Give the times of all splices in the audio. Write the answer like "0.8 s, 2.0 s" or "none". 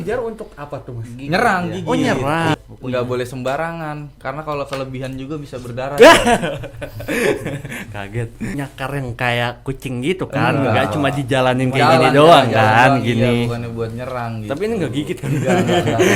2.5 s, 8.5 s